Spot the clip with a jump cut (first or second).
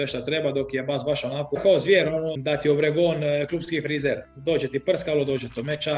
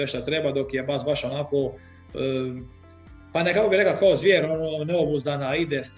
first